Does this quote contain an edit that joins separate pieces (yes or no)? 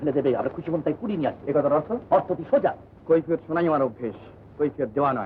yes